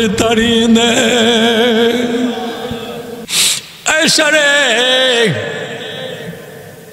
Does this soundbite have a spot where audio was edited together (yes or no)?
yes